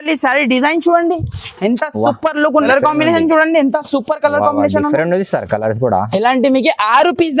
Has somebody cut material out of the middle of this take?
yes; 1 cut; at 2.7 s

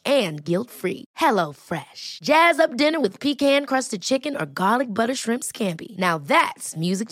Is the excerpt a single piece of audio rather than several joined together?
yes; 0 cuts

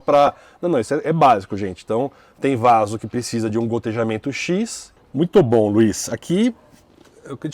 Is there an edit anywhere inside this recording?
yes; 1 cut; at 4.9 s

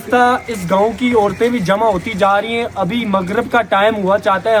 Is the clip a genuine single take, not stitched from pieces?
yes; 0 cuts

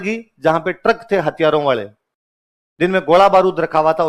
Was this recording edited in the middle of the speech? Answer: no; 0 cuts

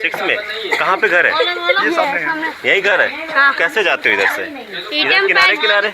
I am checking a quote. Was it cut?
no; 0 cuts

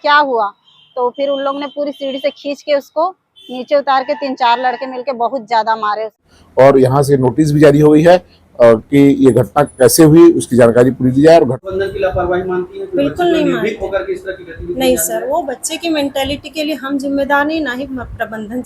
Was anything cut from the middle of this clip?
yes; 2 cuts; at 6.3 s, 11.6 s

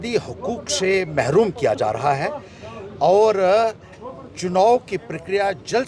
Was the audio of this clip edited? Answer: no; 0 cuts

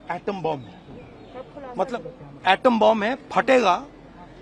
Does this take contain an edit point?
no; 0 cuts

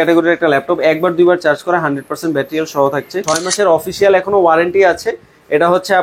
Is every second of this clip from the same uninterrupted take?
no; 1 cut; at 3.4 s

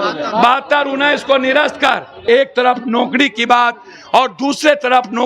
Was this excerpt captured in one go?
no; 1 cut; at 2.3 s

